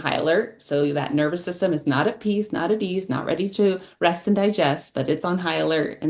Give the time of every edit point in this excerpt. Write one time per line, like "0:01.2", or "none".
none